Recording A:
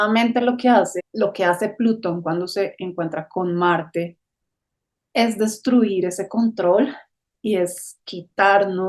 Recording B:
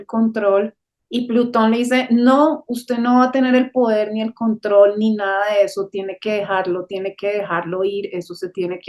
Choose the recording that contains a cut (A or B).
A